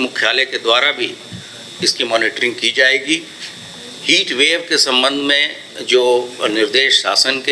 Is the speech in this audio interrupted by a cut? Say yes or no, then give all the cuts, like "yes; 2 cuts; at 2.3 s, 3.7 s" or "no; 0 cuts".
no; 0 cuts